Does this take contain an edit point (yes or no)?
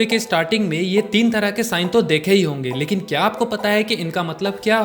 no